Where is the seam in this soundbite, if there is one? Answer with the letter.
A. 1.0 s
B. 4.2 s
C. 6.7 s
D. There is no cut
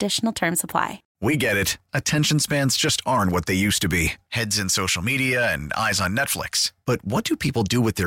A